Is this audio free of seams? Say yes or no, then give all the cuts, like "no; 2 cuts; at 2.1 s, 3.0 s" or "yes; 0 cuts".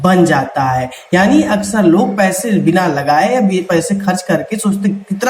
yes; 0 cuts